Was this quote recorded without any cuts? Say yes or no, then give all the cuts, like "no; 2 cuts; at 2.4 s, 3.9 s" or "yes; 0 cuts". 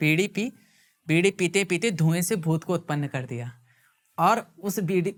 yes; 0 cuts